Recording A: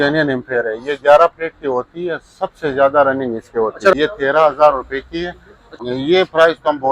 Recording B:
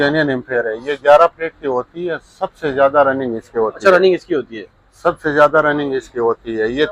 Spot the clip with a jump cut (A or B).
A